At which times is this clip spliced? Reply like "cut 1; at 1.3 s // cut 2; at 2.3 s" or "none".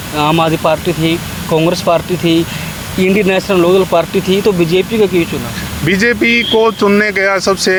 none